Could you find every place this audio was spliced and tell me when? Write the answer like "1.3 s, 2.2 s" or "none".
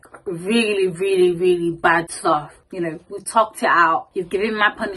2.6 s, 4.1 s